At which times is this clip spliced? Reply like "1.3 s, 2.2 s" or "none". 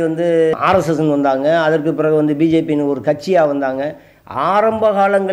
none